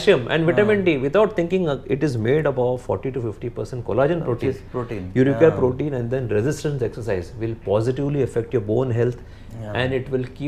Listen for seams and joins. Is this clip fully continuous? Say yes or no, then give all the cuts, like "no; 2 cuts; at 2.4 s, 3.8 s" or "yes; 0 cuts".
yes; 0 cuts